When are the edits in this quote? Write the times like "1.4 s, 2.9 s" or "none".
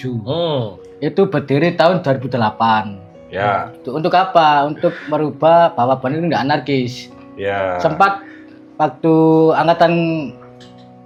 none